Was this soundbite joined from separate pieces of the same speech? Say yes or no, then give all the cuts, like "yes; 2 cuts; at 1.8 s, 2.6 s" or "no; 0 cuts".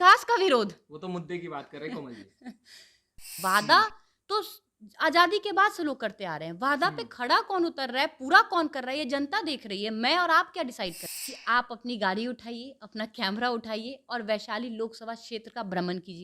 yes; 2 cuts; at 3.3 s, 11.0 s